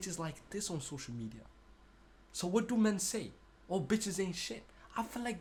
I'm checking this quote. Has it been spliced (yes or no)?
no